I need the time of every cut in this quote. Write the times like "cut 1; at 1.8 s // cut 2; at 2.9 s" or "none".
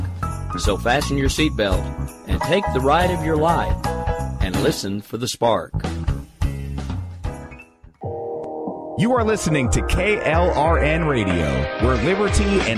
none